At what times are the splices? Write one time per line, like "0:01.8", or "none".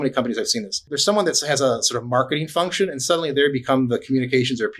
0:00.9